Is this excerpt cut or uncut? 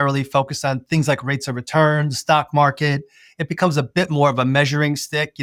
uncut